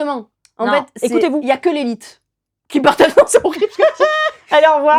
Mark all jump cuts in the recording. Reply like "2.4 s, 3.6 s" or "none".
none